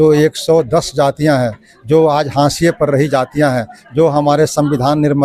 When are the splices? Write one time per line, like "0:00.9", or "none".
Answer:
none